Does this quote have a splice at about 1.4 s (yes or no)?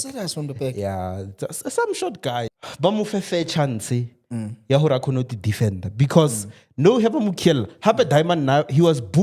no